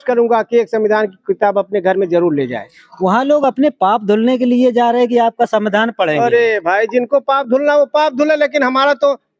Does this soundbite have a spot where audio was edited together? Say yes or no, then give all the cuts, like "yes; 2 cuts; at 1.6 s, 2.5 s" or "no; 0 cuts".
no; 0 cuts